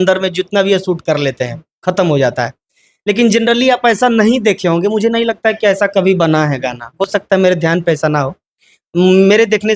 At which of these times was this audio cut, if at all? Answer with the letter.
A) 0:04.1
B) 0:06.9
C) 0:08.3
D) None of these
D